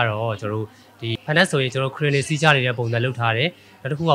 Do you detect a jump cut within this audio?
yes; 1 cut; at 1.1 s

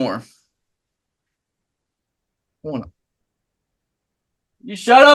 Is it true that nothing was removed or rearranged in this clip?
yes; 0 cuts

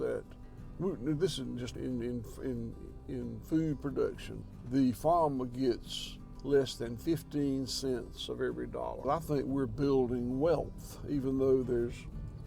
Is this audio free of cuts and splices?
no; 2 cuts; at 1.8 s, 9.0 s

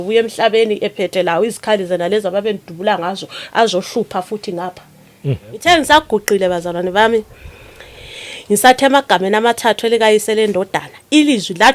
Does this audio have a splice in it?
yes; 1 cut; at 5.7 s

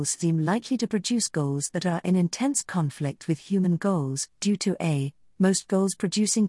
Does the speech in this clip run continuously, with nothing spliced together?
yes; 0 cuts

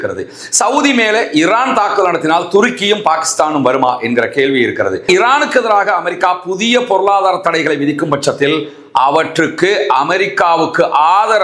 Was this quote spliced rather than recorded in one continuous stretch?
yes; 1 cut; at 5.0 s

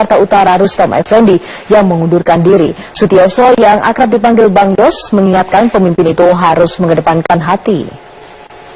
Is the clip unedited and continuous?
no; 1 cut; at 1.0 s

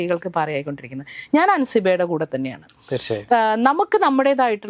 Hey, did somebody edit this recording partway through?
no; 0 cuts

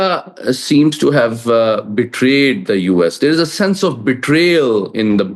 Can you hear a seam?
no; 0 cuts

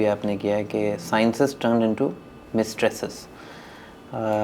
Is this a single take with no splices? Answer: yes; 0 cuts

